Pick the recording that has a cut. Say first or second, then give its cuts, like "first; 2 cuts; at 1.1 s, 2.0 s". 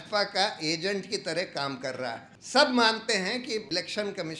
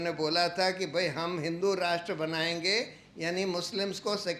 first; 2 cuts; at 2.3 s, 3.1 s